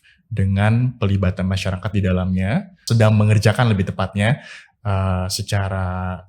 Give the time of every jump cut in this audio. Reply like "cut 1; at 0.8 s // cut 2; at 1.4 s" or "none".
cut 1; at 2.9 s